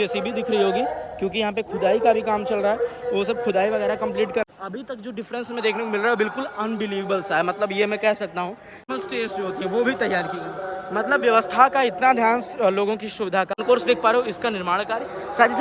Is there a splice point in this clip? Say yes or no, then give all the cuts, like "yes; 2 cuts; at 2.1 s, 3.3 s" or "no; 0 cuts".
yes; 3 cuts; at 4.5 s, 8.9 s, 13.6 s